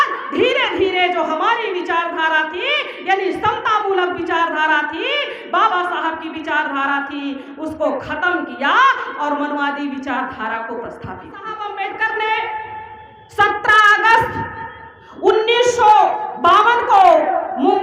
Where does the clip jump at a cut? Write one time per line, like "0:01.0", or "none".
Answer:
0:11.6